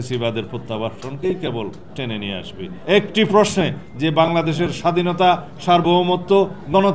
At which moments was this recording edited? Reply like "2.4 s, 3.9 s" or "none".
2.7 s